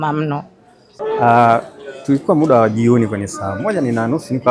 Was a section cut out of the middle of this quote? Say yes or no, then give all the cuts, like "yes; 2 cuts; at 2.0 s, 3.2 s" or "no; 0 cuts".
yes; 1 cut; at 0.9 s